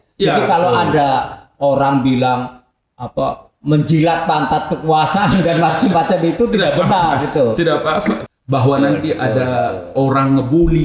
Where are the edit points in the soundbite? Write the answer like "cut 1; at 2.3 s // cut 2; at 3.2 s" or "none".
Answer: cut 1; at 8.2 s